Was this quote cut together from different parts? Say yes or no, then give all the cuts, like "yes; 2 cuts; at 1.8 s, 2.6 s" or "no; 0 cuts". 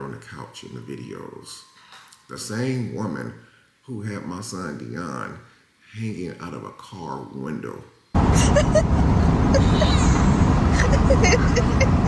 yes; 1 cut; at 8.1 s